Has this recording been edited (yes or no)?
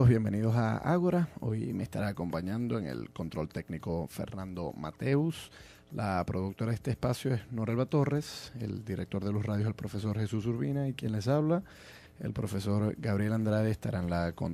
no